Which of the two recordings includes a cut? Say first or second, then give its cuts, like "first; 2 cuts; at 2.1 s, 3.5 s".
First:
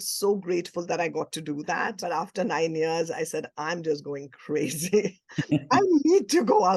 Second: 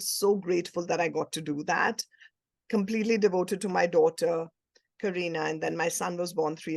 first; 1 cut; at 2.0 s